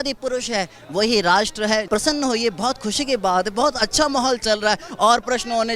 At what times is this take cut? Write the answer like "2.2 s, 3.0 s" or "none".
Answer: 1.9 s